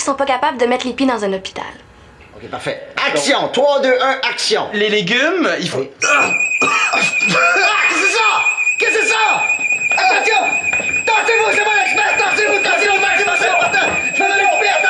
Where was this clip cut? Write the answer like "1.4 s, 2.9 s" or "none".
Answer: 2.5 s